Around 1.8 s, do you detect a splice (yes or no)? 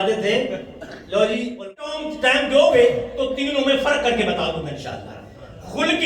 yes